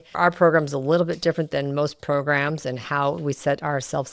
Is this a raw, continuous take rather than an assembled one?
yes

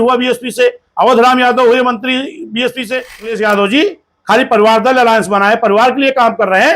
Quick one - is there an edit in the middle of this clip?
yes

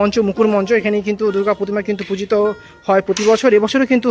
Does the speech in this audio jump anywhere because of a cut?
no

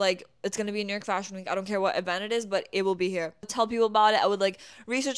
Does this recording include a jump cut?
yes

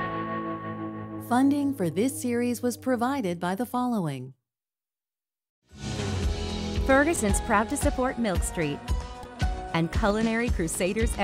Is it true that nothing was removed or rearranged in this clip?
no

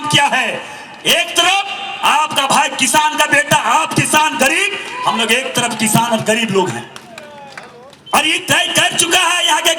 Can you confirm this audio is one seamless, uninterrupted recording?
yes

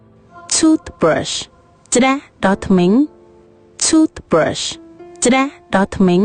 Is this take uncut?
yes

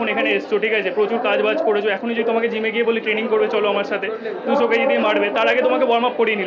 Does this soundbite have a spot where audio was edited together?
no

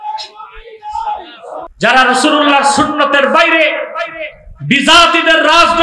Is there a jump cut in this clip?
yes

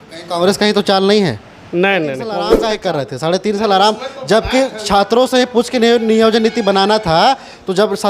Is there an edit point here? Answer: yes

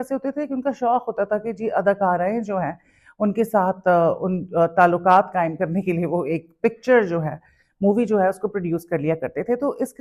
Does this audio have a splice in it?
no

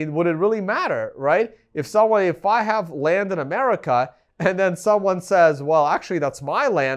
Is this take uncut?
yes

